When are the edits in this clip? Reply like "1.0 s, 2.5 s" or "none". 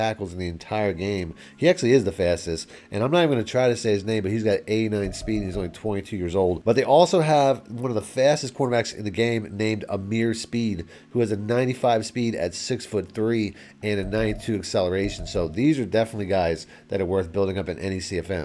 none